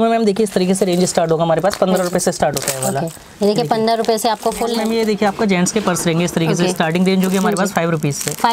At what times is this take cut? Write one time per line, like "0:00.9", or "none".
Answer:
0:04.8